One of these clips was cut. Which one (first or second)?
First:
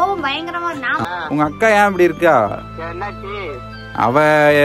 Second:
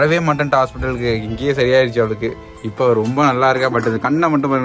first